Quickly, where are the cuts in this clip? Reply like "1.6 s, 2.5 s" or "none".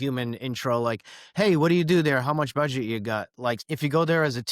3.6 s